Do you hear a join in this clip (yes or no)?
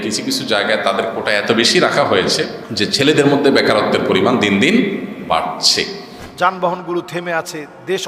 yes